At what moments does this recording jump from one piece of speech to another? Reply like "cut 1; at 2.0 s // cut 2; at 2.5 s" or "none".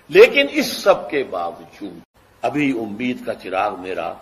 cut 1; at 2.5 s